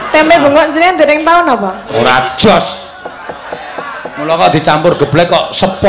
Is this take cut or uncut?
cut